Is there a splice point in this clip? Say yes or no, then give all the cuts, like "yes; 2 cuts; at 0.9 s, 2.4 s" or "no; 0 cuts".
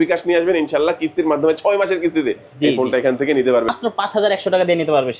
yes; 1 cut; at 3.7 s